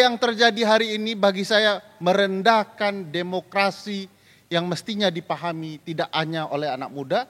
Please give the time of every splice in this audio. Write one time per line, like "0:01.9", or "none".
none